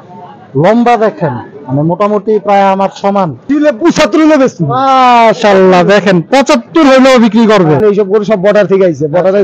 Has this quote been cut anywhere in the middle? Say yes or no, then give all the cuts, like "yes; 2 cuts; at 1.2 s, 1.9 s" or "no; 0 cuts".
yes; 2 cuts; at 3.5 s, 7.8 s